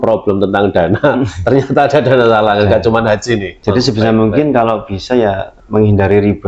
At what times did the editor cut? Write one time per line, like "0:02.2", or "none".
0:03.5
0:05.5